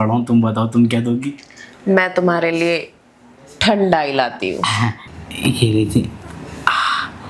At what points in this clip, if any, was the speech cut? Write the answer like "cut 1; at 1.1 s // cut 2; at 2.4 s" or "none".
cut 1; at 5.1 s